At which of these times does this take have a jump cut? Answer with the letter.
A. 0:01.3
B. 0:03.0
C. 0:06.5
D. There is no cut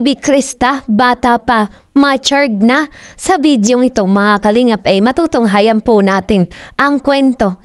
D